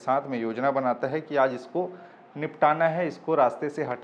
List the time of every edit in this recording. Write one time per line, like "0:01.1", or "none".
none